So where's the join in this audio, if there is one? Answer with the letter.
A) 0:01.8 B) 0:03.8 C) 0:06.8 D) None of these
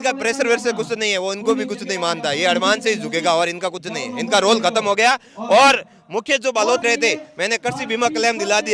C